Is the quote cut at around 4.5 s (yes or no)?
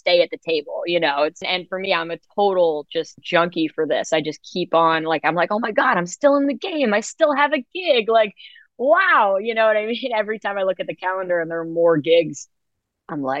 no